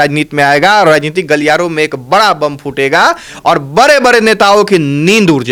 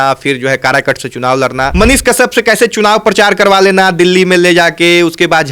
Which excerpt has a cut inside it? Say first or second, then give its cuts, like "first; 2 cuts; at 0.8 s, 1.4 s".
second; 1 cut; at 1.7 s